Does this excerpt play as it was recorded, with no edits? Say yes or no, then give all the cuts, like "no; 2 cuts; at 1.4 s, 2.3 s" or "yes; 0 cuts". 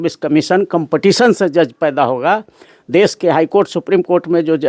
yes; 0 cuts